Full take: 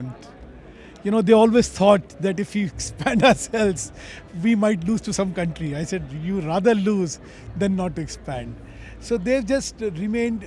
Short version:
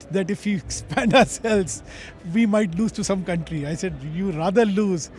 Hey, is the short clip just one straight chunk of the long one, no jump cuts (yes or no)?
yes